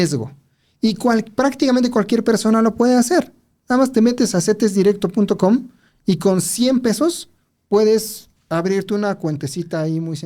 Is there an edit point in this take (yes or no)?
no